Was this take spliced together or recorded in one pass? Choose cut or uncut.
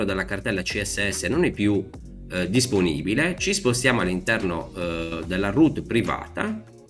uncut